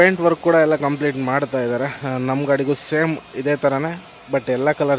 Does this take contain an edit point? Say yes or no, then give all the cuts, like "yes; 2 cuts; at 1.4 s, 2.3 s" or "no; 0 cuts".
no; 0 cuts